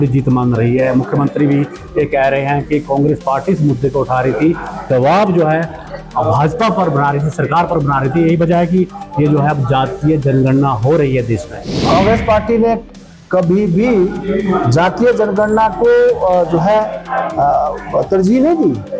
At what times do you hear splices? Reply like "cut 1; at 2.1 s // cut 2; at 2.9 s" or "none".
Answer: cut 1; at 11.8 s